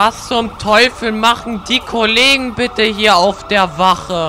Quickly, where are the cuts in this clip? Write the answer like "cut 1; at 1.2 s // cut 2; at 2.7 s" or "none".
none